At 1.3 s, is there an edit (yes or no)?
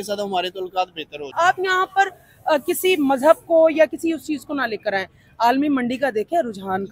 yes